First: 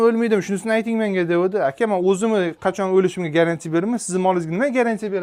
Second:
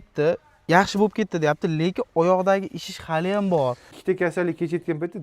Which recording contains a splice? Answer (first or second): second